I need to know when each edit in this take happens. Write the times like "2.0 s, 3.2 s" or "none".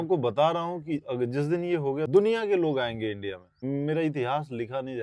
2.1 s, 3.6 s